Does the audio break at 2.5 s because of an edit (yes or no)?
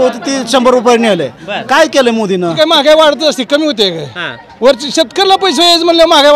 yes